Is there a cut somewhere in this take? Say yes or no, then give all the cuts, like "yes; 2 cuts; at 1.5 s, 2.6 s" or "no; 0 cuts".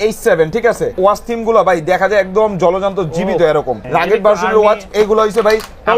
yes; 2 cuts; at 0.9 s, 3.8 s